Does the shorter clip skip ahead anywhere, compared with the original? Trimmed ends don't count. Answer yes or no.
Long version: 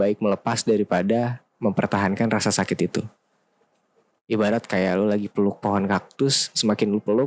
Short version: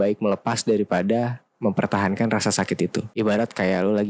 yes